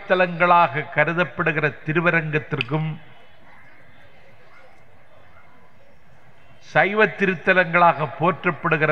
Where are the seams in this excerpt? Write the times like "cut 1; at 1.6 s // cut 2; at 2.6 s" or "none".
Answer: none